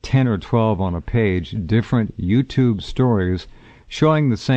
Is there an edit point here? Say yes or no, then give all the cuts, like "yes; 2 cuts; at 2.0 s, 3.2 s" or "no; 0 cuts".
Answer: yes; 1 cut; at 1.0 s